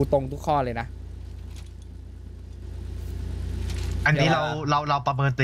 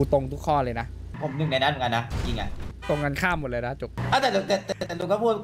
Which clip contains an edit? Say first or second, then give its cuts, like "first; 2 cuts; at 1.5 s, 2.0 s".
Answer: second; 3 cuts; at 1.1 s, 2.7 s, 4.0 s